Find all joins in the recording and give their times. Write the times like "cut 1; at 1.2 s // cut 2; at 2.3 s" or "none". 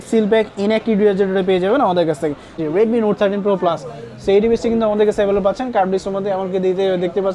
cut 1; at 2.6 s

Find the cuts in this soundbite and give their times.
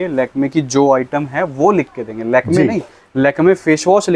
none

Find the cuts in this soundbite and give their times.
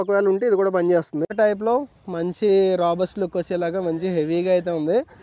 cut 1; at 1.3 s

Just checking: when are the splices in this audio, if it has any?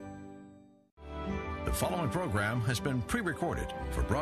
cut 1; at 0.9 s

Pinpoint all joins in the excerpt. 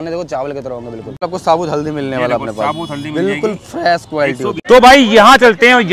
cut 1; at 1.2 s // cut 2; at 4.6 s

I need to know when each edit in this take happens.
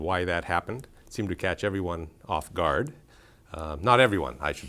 cut 1; at 2.7 s

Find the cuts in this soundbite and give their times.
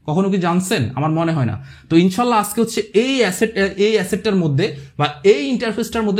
none

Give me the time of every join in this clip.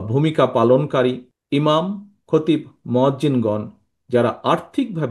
cut 1; at 1.3 s

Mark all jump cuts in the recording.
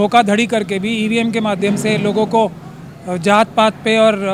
none

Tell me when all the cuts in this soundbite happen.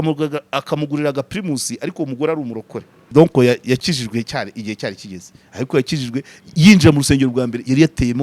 cut 1; at 3.1 s

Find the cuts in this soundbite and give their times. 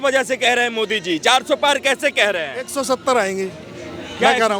none

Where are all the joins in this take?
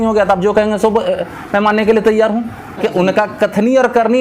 cut 1; at 2.8 s

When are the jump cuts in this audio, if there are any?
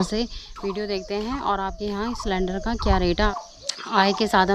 cut 1; at 3.3 s

